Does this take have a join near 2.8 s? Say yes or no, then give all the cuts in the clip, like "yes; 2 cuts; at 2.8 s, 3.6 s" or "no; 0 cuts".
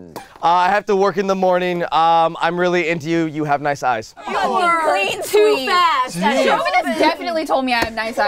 no; 2 cuts; at 4.5 s, 6.4 s